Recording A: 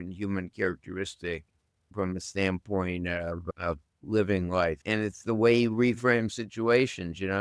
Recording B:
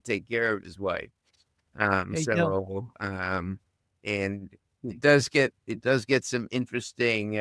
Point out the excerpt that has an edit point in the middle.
A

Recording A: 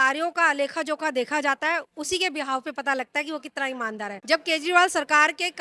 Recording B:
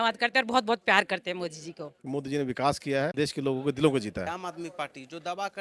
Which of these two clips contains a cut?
B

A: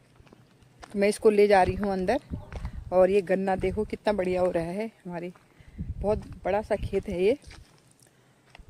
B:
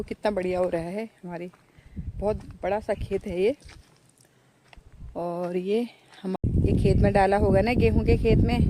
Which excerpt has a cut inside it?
B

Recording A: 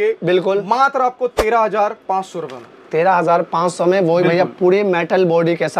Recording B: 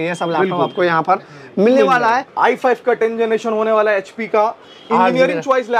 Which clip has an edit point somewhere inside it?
B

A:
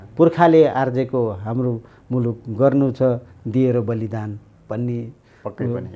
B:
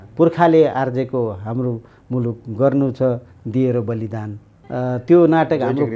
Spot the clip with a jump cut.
B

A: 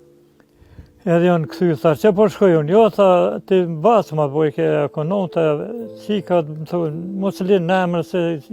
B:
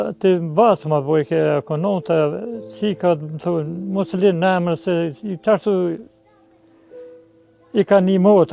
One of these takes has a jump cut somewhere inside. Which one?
B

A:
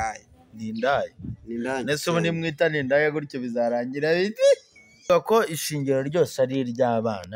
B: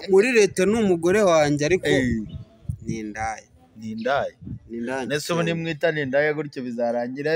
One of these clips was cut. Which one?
A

